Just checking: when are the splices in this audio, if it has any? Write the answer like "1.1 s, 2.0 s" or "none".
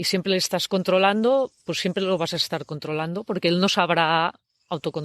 none